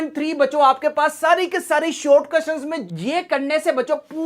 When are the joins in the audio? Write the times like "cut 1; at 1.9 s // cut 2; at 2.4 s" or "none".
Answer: cut 1; at 2.8 s